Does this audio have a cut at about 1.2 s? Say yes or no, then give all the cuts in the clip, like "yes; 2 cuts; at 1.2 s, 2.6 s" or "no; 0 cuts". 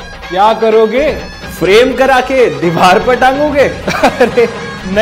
no; 1 cut; at 2.9 s